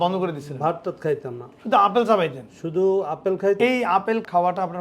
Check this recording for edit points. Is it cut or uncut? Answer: cut